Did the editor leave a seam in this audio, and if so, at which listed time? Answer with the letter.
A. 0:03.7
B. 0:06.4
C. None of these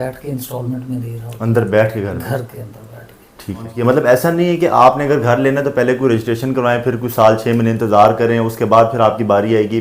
A